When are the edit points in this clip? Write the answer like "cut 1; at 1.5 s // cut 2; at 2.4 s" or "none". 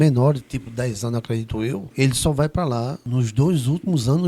cut 1; at 1.9 s // cut 2; at 3.0 s

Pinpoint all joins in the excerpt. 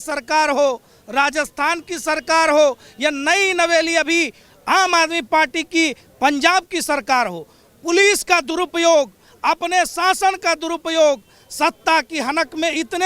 none

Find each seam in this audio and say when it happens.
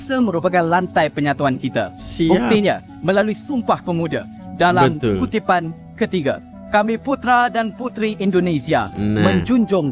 none

